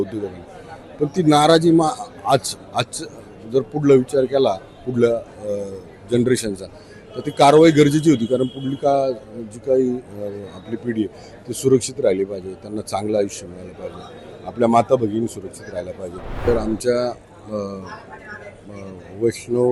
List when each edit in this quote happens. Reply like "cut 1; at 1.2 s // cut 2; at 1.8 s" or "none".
cut 1; at 16.4 s